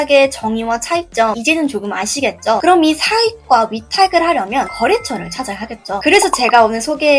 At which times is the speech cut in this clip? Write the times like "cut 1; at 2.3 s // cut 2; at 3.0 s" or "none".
none